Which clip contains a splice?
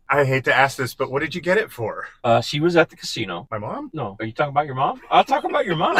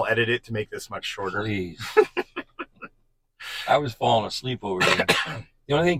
first; 2 cuts; at 2.1 s, 3.7 s

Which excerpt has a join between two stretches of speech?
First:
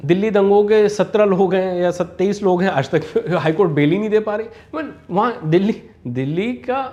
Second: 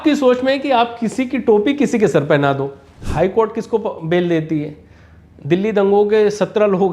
second; 1 cut; at 3.0 s

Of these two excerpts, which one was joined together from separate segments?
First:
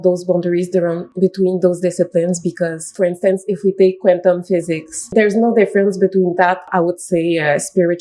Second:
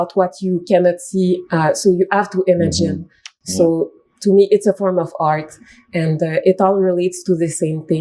first; 4 cuts; at 1.1 s, 2.9 s, 5.1 s, 6.7 s

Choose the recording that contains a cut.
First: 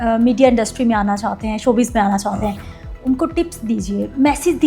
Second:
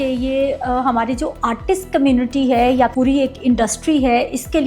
second; 1 cut; at 2.9 s

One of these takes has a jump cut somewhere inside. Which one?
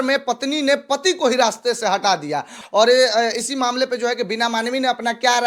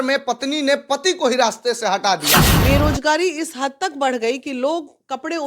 second; 1 cut; at 2.5 s

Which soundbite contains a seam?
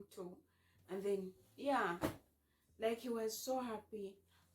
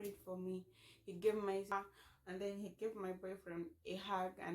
second; 1 cut; at 1.7 s

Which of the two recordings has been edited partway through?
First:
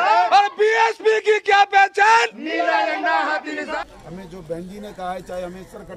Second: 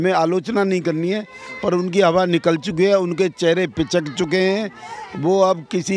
first; 1 cut; at 3.6 s

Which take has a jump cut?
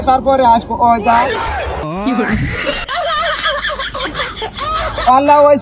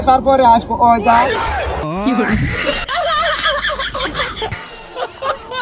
second; 1 cut; at 4.6 s

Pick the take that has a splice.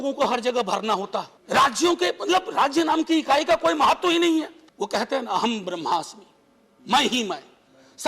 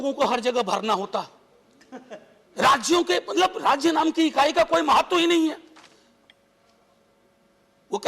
first; 2 cuts; at 1.4 s, 4.6 s

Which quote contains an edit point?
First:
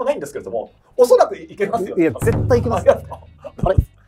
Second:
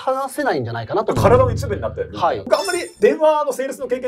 second; 1 cut; at 2.9 s

